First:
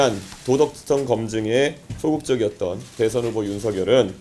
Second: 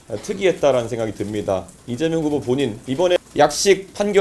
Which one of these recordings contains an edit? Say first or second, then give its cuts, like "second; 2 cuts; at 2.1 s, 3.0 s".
second; 1 cut; at 3.1 s